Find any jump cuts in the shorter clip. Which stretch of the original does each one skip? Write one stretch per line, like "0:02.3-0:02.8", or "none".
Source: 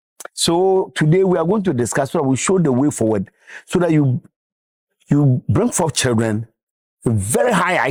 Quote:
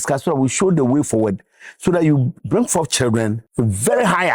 0:04.3-0:05.5
0:06.5-0:06.9